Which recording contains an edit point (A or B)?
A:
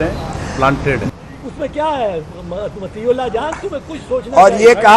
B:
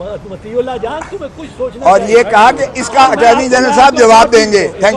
A